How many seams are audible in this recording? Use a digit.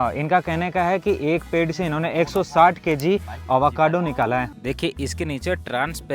1